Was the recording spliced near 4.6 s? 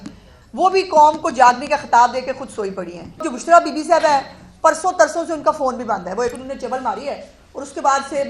no; 1 cut; at 3.3 s

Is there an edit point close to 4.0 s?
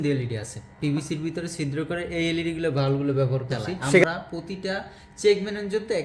yes; 1 cut; at 4.0 s

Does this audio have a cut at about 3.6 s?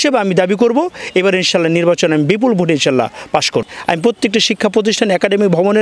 yes; 1 cut; at 3.6 s

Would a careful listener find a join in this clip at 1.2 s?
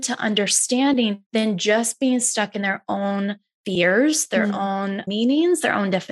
yes; 2 cuts; at 1.2 s, 5.1 s

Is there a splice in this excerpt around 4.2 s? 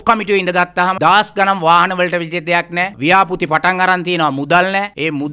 no; 1 cut; at 1.0 s

